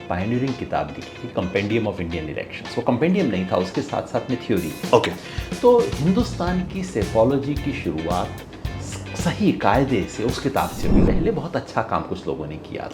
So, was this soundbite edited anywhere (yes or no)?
yes